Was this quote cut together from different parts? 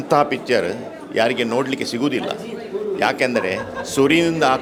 no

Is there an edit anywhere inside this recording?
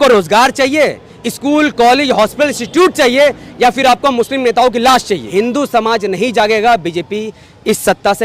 yes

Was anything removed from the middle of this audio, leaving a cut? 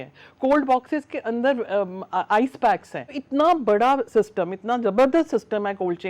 yes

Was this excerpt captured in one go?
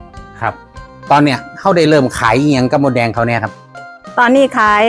no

